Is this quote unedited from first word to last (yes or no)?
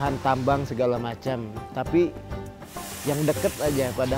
yes